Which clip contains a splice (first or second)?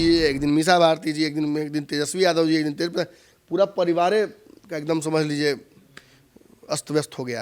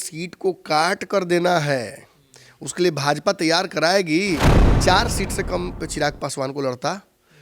second